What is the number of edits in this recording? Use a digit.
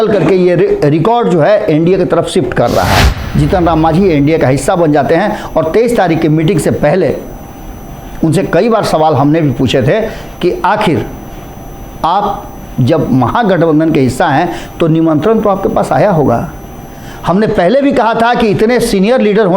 1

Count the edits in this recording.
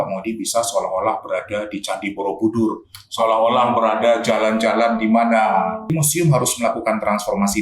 1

